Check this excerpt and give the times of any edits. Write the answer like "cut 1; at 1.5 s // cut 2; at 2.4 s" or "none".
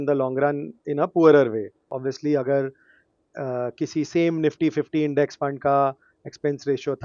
cut 1; at 1.9 s